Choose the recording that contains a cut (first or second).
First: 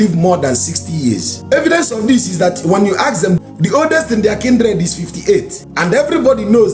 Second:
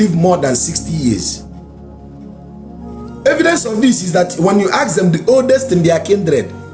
first